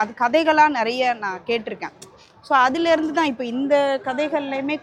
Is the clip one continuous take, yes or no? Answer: yes